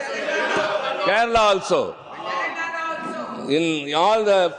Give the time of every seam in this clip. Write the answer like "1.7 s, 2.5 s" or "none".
none